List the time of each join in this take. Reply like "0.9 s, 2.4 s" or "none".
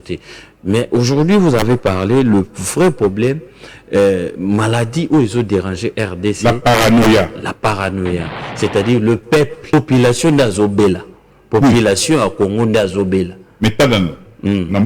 9.6 s